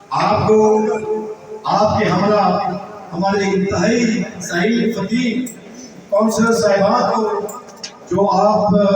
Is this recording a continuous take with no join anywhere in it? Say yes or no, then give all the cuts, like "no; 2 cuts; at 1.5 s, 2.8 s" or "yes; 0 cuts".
yes; 0 cuts